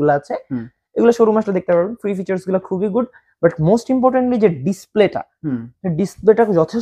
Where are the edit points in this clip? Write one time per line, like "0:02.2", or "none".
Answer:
none